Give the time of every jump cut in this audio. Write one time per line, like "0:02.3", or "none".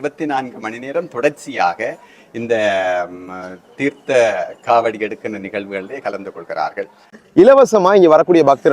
0:07.1